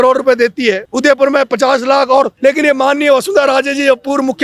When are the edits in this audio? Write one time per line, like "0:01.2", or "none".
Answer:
0:00.9
0:02.3